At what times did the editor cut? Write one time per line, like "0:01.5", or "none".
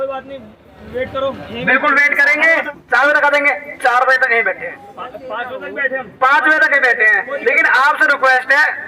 0:02.7